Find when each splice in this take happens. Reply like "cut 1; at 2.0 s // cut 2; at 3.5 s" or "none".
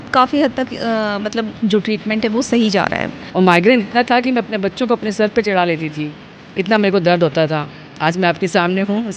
cut 1; at 1.5 s // cut 2; at 3.2 s // cut 3; at 7.8 s